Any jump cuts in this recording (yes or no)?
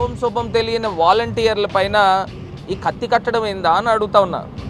no